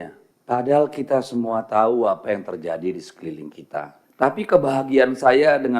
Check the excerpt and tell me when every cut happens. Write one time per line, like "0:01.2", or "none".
0:04.0

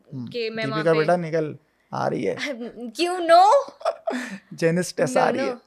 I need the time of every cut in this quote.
none

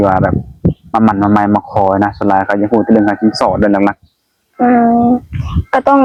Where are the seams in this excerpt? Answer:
none

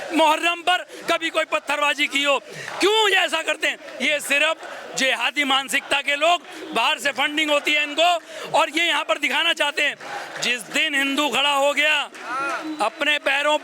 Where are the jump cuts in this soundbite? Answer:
none

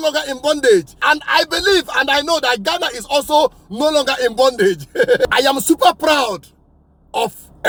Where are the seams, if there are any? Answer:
none

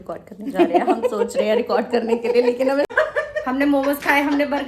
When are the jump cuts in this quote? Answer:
0:02.9

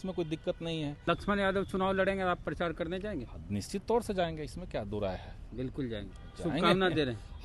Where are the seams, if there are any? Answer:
0:01.0

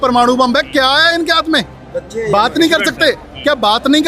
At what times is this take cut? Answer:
none

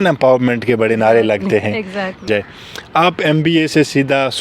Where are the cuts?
0:02.3

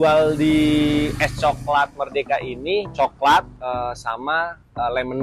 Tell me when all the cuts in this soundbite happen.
0:02.9
0:03.5

